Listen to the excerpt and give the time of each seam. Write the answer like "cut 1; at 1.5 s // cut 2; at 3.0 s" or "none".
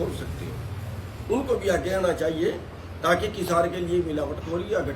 none